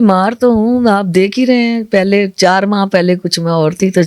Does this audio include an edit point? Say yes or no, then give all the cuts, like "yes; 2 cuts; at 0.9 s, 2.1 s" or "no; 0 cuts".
no; 0 cuts